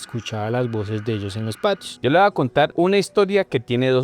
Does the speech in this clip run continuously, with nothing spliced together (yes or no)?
no